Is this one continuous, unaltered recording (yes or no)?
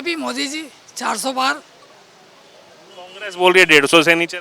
yes